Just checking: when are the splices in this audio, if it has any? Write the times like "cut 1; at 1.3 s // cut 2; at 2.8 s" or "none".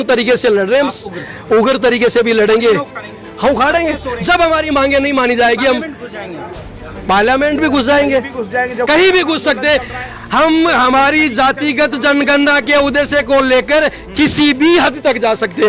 none